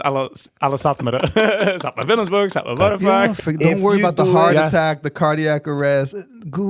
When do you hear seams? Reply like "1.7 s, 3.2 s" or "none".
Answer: 3.3 s